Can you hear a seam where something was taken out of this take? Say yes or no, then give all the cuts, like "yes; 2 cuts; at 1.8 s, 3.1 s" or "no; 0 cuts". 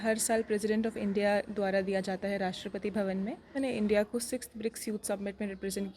yes; 1 cut; at 3.5 s